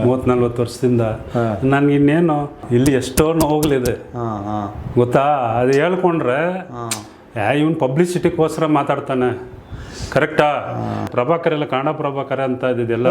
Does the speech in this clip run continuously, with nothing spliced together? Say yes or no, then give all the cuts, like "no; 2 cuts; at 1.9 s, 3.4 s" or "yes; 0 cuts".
no; 2 cuts; at 2.6 s, 11.1 s